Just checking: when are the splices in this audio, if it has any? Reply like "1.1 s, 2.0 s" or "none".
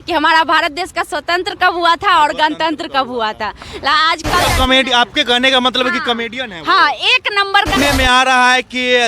4.5 s, 7.8 s